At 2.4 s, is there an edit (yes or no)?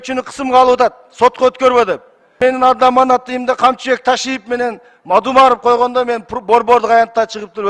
yes